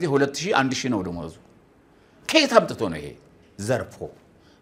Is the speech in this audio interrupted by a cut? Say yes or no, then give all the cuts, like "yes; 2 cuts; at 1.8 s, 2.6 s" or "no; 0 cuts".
no; 0 cuts